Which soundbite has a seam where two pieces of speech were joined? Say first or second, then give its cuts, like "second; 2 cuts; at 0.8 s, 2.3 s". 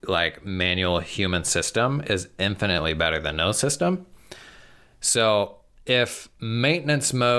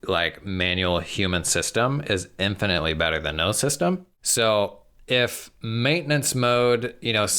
second; 1 cut; at 4.2 s